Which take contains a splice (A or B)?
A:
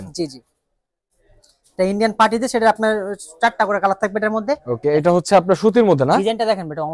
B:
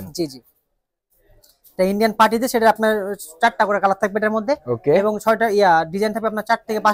A